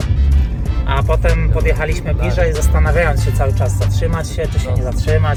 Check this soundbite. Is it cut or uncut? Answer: uncut